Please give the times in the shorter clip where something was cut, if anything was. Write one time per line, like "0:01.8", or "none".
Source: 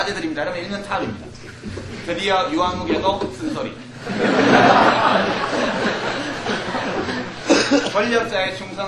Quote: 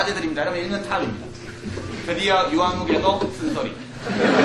none